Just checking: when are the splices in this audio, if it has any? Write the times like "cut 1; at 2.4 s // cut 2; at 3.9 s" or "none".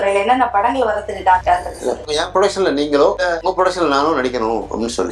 cut 1; at 2.0 s